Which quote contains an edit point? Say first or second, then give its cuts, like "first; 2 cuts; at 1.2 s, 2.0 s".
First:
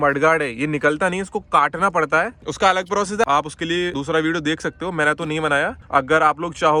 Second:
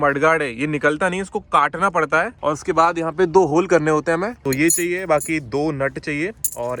second; 2 cuts; at 2.3 s, 4.4 s